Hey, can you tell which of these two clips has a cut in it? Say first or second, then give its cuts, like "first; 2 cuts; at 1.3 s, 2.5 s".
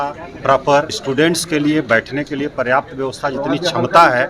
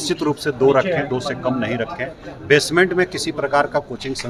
first; 1 cut; at 1.0 s